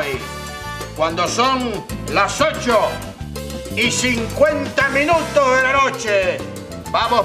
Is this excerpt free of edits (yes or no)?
yes